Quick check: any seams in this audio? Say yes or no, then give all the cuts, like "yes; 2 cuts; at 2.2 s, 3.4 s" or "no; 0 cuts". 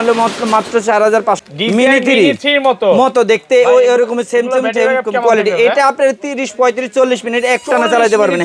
yes; 1 cut; at 1.4 s